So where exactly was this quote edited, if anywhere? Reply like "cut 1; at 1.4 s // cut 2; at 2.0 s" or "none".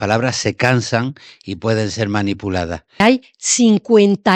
cut 1; at 3.0 s